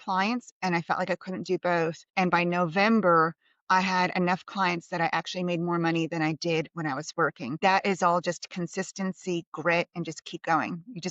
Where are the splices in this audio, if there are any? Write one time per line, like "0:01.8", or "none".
0:02.0
0:07.5